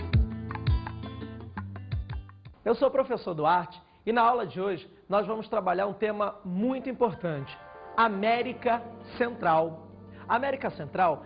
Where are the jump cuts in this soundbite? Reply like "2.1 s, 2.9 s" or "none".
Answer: none